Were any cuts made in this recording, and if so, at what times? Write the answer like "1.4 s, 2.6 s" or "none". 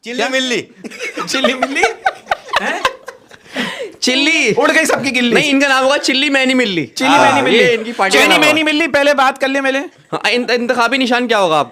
none